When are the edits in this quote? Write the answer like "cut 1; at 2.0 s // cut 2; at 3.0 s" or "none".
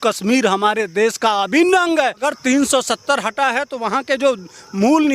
cut 1; at 2.2 s